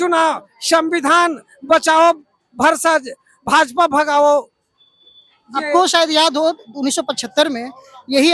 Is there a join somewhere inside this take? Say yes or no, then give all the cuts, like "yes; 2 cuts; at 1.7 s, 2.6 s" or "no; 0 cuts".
no; 0 cuts